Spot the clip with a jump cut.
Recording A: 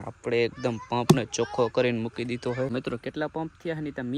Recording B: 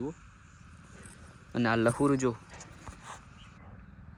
A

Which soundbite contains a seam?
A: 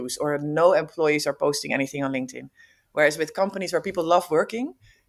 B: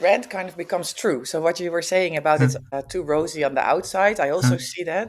B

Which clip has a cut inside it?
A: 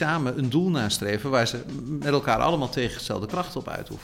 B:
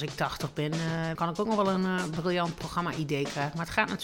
B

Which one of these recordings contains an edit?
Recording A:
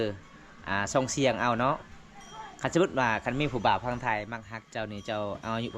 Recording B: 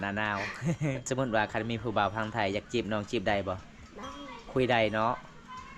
B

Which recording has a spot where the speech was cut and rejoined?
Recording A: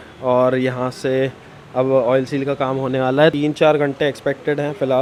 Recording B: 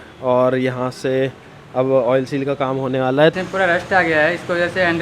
B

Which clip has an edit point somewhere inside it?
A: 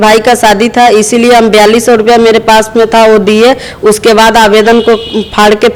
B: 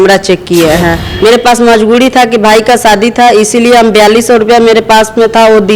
B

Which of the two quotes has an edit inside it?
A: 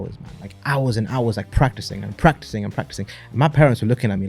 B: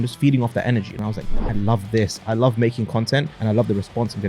B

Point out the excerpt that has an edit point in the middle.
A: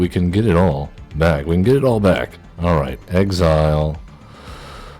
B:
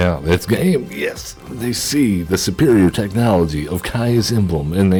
A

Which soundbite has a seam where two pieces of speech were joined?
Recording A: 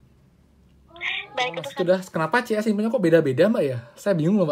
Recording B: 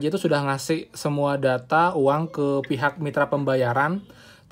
A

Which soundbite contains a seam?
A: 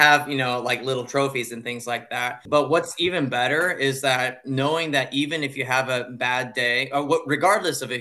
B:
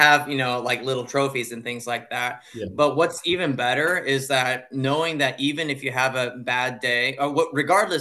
A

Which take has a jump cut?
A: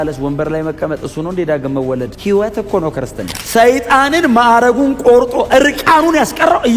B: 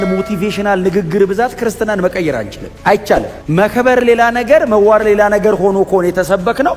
A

